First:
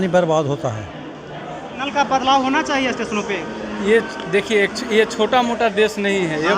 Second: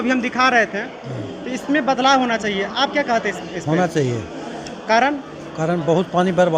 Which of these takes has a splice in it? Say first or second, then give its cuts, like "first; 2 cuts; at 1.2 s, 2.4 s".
first; 1 cut; at 1.8 s